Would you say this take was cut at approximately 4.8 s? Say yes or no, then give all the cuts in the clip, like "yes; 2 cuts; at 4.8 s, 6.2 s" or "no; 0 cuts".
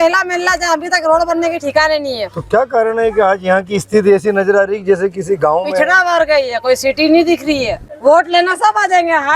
no; 1 cut; at 7.8 s